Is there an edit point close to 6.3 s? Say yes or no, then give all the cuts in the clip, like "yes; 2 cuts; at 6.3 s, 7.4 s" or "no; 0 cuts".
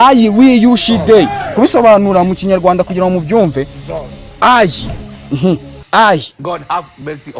yes; 1 cut; at 6.3 s